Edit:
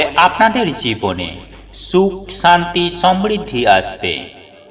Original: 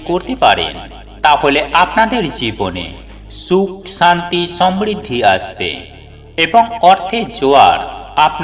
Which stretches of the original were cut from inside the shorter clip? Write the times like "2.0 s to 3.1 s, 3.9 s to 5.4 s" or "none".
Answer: none